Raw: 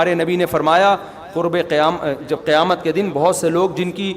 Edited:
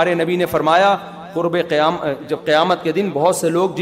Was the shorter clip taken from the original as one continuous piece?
yes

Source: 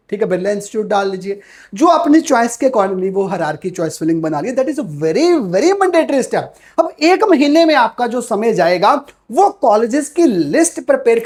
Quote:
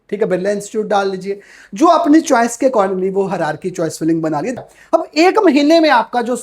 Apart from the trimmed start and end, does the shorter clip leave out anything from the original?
yes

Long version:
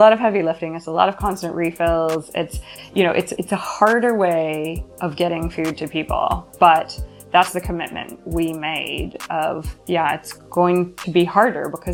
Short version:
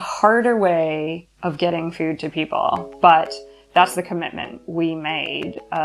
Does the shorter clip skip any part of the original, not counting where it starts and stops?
no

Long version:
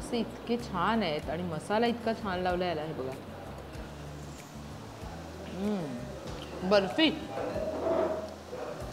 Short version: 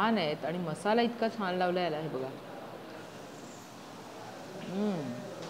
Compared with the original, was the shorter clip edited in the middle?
no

